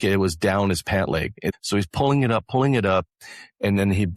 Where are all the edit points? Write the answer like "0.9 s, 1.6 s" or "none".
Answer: 1.5 s